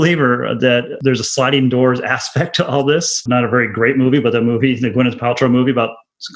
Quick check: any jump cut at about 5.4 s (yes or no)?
no